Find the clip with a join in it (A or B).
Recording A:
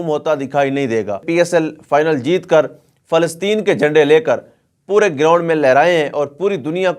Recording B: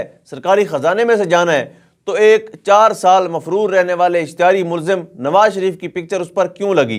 A